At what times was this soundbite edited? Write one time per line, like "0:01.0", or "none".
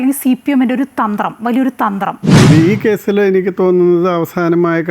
0:02.2